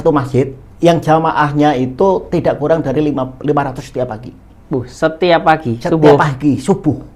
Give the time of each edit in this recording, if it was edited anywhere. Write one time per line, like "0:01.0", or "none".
none